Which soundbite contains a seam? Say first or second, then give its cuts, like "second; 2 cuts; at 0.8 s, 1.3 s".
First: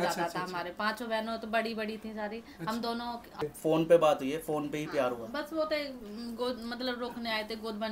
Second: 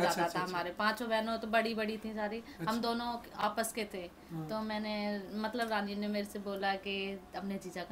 first; 1 cut; at 3.4 s